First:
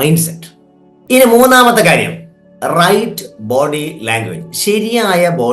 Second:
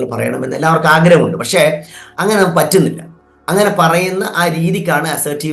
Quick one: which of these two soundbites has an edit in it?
first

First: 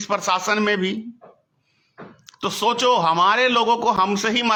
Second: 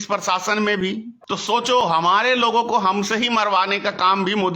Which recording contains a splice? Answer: second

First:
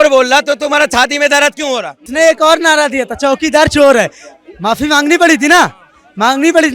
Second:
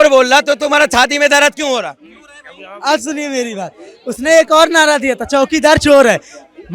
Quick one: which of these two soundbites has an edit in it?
first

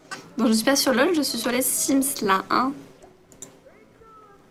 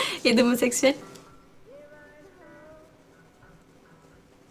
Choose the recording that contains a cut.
second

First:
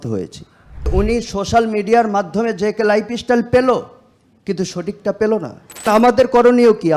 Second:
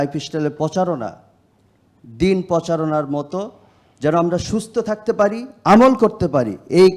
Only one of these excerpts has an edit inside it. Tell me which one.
first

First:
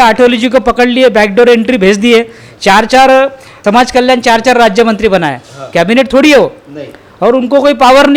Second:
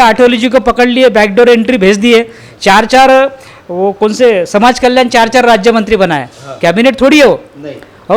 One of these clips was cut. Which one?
first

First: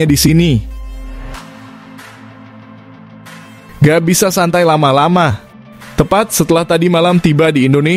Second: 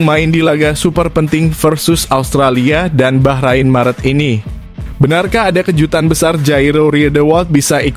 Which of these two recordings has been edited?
first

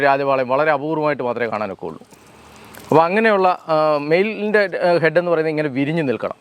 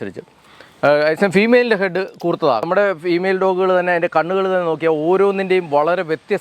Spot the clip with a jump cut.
second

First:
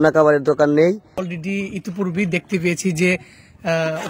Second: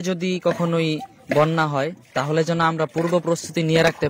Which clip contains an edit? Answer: first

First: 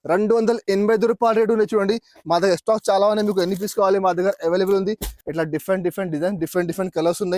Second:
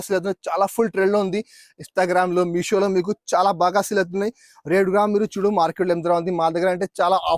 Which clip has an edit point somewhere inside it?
first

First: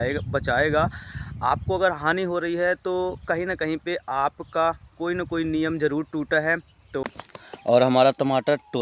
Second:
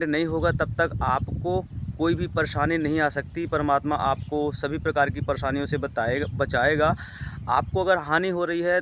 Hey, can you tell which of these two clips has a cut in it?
first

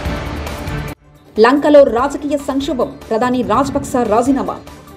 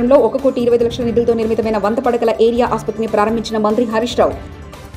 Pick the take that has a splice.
first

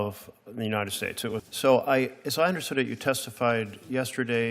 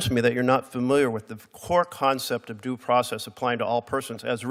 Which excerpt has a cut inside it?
first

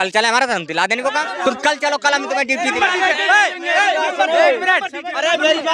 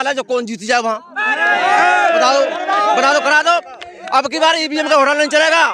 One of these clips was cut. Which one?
first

